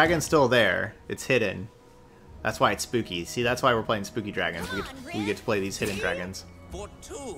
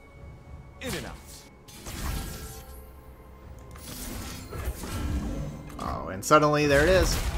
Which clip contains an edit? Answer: second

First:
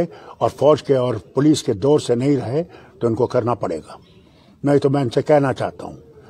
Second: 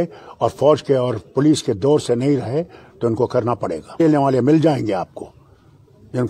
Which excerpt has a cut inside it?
second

